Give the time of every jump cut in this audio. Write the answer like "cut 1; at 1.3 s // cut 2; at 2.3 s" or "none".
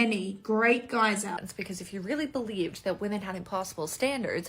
cut 1; at 1.5 s